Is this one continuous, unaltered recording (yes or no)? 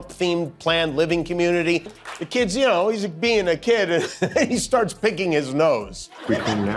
no